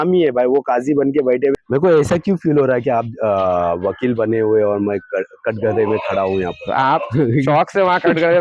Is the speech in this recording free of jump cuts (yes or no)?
no